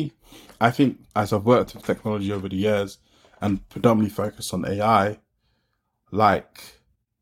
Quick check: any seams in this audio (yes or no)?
yes